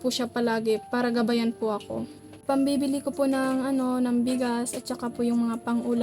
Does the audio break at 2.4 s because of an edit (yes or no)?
yes